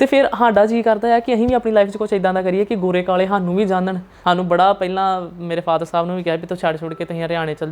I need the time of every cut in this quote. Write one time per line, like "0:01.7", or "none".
0:04.1